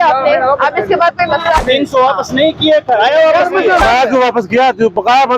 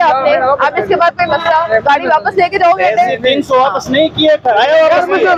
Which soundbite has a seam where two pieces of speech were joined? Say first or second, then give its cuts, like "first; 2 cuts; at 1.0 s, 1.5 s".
first; 2 cuts; at 1.6 s, 3.8 s